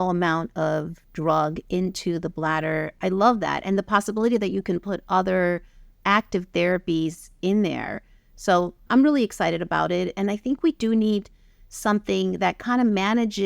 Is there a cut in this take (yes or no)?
yes